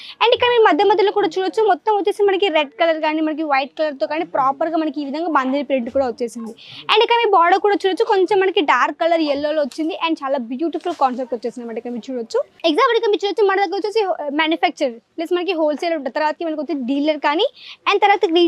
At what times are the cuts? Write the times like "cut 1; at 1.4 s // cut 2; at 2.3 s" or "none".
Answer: cut 1; at 12.5 s